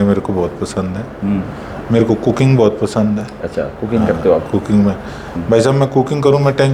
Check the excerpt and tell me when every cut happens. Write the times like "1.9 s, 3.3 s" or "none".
none